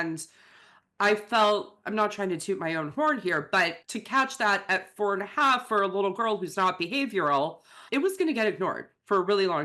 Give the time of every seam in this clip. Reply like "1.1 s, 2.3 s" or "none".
3.8 s, 7.8 s